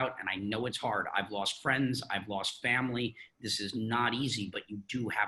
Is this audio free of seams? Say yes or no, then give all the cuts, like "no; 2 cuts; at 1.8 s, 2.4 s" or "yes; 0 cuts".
yes; 0 cuts